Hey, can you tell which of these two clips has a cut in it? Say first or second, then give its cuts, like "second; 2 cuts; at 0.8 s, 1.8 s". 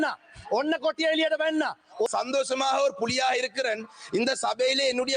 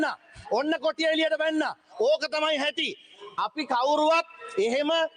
first; 1 cut; at 2.1 s